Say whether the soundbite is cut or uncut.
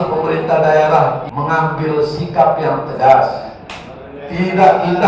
cut